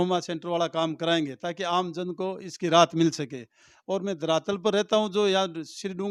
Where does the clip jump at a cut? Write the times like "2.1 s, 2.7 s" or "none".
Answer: none